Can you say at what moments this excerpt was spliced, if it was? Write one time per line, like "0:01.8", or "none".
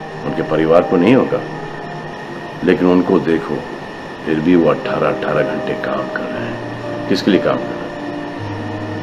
none